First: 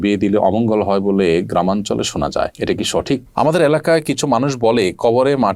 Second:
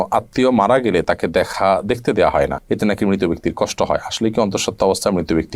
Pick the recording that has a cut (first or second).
first